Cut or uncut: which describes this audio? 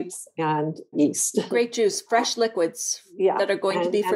cut